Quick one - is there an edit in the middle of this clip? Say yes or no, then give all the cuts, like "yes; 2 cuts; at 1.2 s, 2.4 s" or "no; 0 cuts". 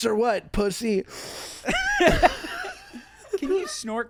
no; 0 cuts